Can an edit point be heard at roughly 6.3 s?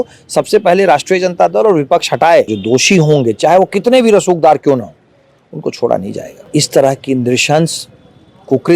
yes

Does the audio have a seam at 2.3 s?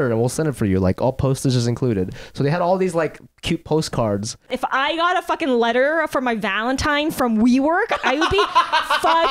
no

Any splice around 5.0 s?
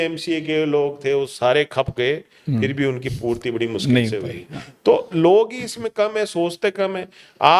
no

